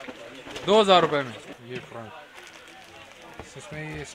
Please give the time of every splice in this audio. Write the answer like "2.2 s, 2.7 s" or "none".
1.4 s